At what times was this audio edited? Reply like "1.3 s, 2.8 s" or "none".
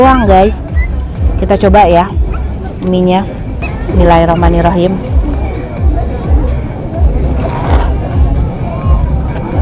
none